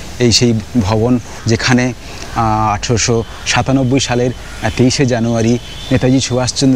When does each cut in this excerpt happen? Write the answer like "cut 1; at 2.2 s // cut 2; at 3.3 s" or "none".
none